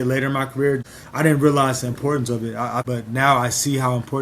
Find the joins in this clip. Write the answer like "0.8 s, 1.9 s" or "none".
1.0 s, 2.9 s